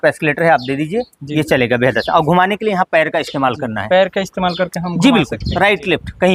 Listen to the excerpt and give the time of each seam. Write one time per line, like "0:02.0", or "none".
none